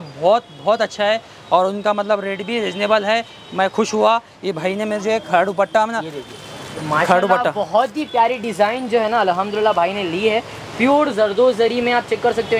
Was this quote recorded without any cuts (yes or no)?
yes